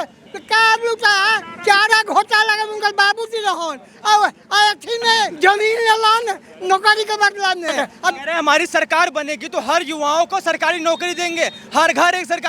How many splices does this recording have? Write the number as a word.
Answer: three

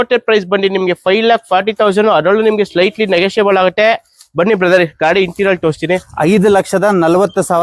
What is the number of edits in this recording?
zero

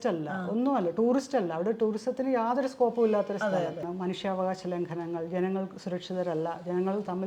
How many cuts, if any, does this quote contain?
one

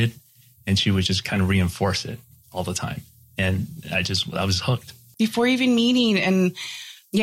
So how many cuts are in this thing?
one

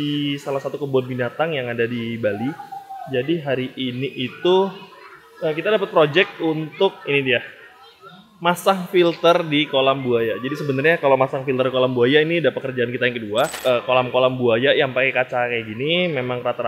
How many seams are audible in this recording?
one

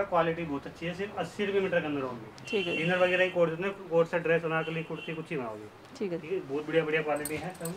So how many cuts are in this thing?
zero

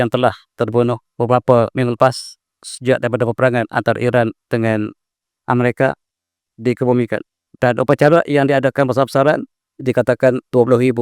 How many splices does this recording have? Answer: two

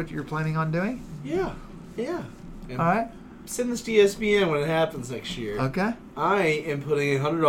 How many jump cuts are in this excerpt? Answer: one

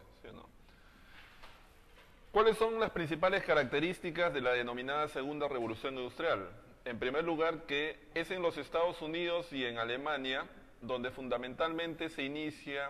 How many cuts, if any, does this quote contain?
one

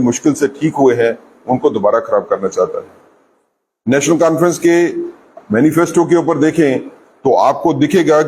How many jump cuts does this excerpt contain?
zero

